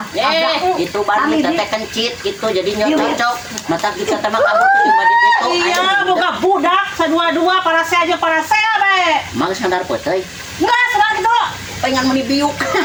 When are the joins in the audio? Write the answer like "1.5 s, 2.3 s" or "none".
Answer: none

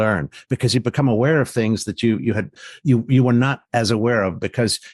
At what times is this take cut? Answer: 2.5 s

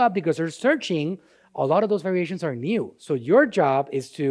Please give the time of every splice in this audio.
none

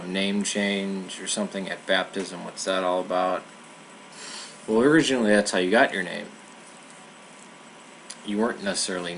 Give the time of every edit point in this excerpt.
7.2 s

